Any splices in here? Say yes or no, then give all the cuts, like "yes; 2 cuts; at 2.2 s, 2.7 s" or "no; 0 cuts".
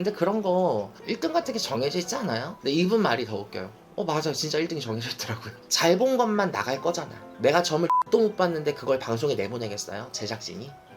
yes; 2 cuts; at 2.5 s, 5.6 s